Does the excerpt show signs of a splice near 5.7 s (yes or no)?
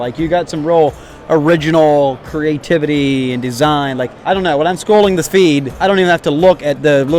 yes